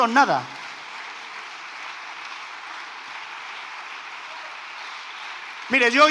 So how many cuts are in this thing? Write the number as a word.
zero